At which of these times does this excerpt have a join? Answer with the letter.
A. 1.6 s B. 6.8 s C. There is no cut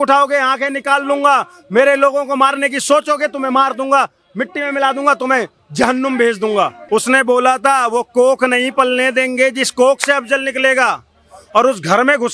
B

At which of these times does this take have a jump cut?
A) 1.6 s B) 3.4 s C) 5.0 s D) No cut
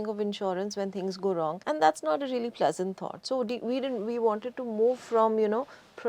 A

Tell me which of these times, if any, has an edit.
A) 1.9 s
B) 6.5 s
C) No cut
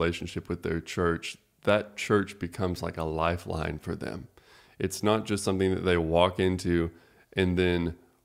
C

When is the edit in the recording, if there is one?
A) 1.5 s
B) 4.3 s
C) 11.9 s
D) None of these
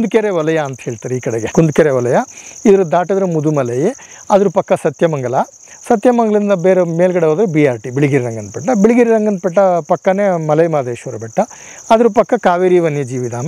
A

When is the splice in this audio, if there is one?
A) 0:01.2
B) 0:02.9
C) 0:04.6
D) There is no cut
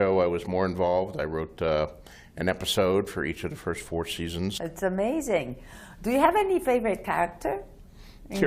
C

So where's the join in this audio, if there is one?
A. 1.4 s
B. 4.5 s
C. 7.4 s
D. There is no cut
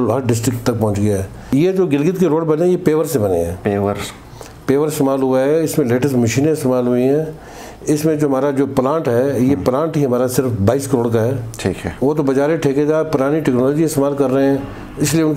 A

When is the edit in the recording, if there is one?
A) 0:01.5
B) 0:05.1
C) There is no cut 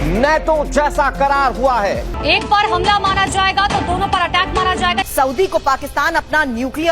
B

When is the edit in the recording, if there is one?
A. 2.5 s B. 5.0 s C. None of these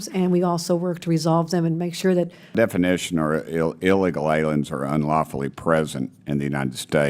A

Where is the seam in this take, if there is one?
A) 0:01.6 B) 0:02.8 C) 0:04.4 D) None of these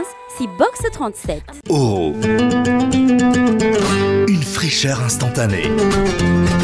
A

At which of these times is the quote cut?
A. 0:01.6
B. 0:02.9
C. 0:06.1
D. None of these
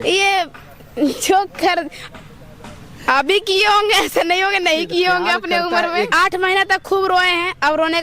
C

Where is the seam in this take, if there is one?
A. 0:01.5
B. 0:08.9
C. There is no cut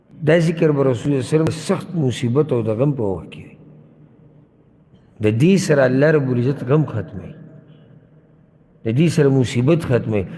A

